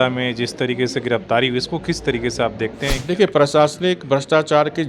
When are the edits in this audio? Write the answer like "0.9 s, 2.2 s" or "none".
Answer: 3.0 s

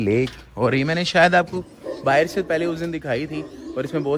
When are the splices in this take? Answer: none

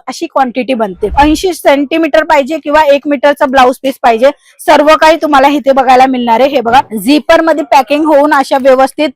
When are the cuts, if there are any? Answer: 1.0 s

